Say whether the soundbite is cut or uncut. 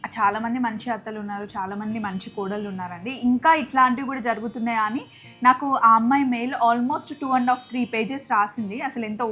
uncut